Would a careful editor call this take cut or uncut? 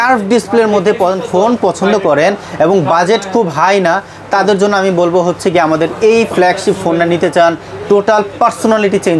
uncut